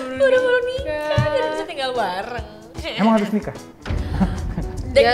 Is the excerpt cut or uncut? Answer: uncut